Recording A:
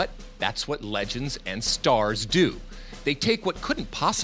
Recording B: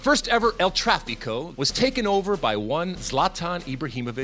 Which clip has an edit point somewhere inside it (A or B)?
B